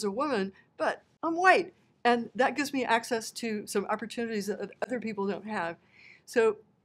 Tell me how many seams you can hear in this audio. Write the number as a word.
zero